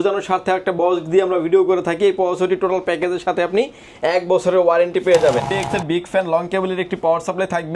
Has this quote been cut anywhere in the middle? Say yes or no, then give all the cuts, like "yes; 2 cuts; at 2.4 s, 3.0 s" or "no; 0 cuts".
yes; 1 cut; at 5.6 s